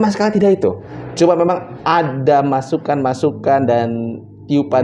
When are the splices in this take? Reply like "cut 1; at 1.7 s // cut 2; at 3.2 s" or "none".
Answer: cut 1; at 0.9 s